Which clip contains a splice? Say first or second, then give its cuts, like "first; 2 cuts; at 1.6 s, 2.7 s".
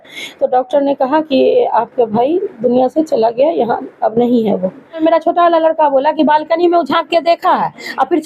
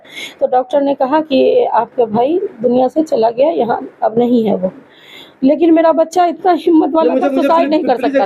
first; 1 cut; at 5.0 s